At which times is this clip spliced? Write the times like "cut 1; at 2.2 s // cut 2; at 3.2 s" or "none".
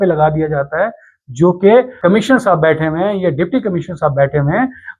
cut 1; at 1.9 s